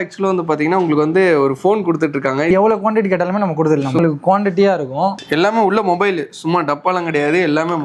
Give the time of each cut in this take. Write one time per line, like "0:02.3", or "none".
0:02.5
0:04.0
0:05.2